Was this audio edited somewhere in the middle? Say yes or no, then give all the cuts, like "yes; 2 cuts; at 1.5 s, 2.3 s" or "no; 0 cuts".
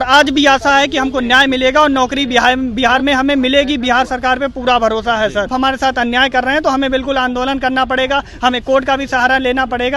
yes; 1 cut; at 5.5 s